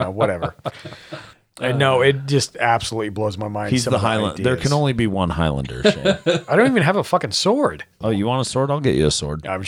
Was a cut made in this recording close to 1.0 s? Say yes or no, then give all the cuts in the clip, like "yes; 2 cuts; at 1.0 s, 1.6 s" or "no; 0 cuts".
no; 1 cut; at 8.0 s